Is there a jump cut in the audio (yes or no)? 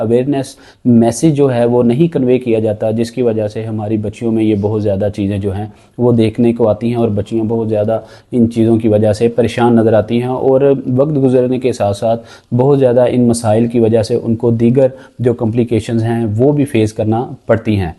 no